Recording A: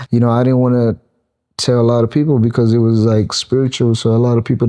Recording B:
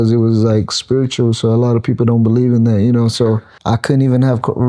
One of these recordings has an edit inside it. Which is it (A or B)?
B